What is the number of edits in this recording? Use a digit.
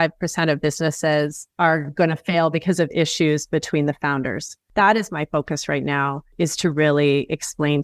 2